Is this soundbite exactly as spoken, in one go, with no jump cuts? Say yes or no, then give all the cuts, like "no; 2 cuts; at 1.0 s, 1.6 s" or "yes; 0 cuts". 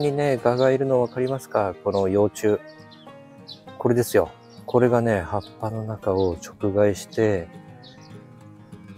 yes; 0 cuts